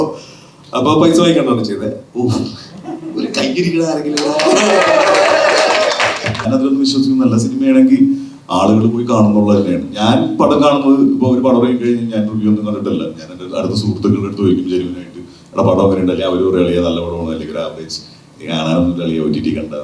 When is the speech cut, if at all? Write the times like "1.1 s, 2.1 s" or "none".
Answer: 6.5 s